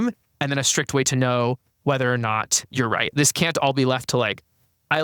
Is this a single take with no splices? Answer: no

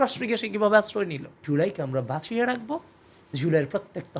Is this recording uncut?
no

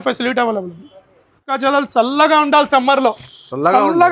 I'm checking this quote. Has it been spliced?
yes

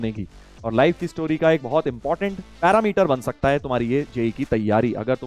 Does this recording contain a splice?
no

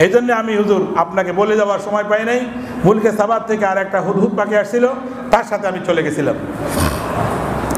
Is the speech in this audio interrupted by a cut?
no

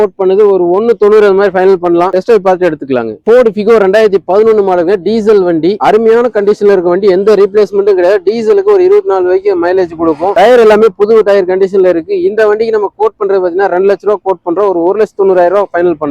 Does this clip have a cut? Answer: no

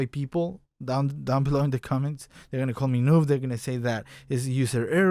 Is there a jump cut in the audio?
no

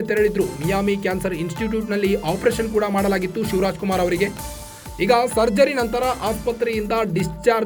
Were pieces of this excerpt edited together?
no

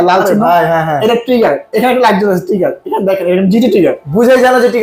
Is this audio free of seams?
yes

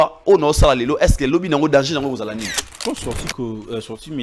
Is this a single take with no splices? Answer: no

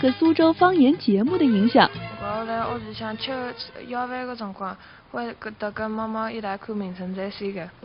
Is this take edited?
yes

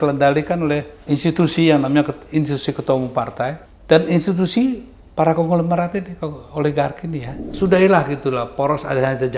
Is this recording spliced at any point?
yes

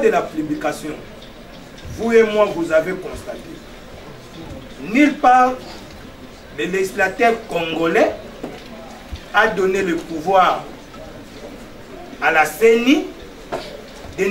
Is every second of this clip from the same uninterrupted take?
yes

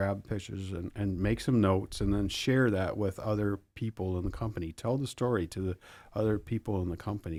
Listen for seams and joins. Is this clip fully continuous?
yes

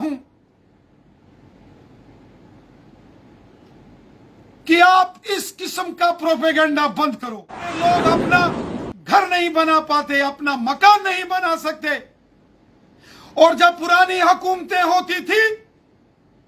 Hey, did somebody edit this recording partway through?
yes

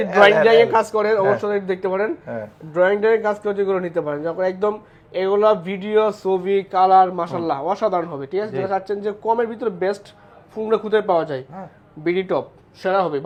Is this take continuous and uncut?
yes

